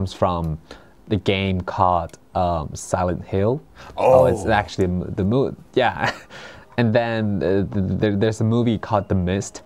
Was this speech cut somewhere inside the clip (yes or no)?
no